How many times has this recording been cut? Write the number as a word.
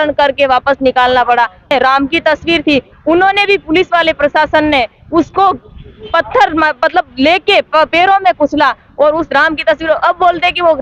one